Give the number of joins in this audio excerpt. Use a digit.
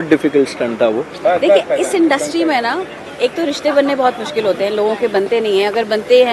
1